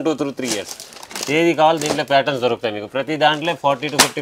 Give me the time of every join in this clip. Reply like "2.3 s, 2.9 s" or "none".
none